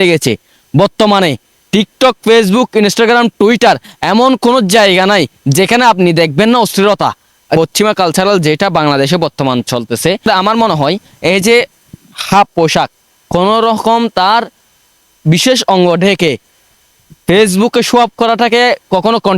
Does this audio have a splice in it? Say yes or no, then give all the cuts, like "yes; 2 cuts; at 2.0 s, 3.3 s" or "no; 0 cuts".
yes; 2 cuts; at 7.6 s, 10.3 s